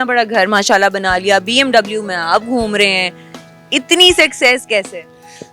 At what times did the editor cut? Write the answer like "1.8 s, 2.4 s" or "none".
none